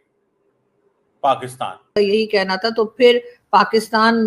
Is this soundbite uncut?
no; 1 cut; at 1.9 s

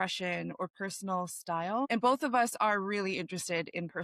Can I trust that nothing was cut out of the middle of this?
no; 1 cut; at 1.9 s

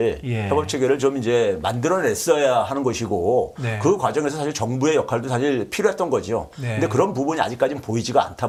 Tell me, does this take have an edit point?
no; 0 cuts

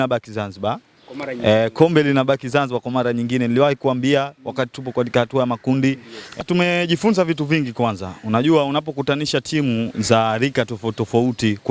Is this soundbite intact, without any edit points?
no; 1 cut; at 6.4 s

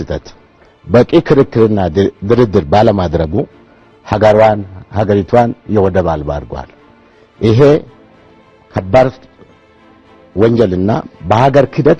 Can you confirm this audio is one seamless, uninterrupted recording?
yes; 0 cuts

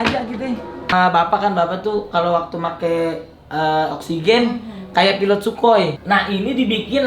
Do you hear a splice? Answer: yes; 2 cuts; at 0.9 s, 6.0 s

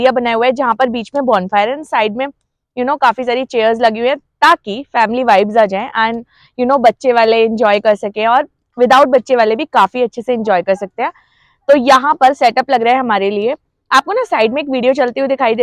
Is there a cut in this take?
no; 0 cuts

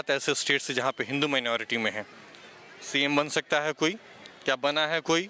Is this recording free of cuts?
yes; 0 cuts

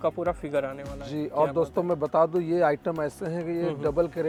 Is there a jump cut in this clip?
no; 0 cuts

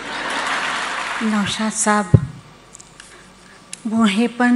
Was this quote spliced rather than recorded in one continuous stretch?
yes; 1 cut; at 1.1 s

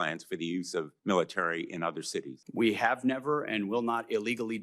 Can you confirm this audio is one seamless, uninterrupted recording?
no; 2 cuts; at 0.9 s, 2.4 s

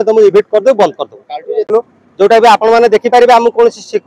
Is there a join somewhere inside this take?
yes; 1 cut; at 1.7 s

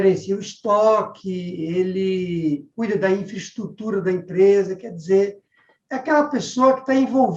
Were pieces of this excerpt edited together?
no; 0 cuts

